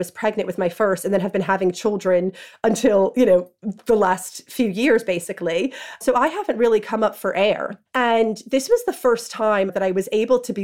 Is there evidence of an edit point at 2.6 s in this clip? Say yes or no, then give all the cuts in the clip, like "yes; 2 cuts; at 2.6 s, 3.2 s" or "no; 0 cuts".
no; 3 cuts; at 6.0 s, 7.8 s, 9.7 s